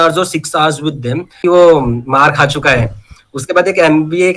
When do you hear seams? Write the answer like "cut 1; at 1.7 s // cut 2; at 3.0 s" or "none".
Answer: cut 1; at 1.4 s

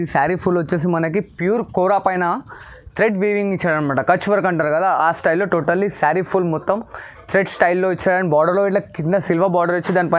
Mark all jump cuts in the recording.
none

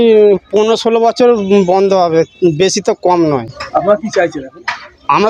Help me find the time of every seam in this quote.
none

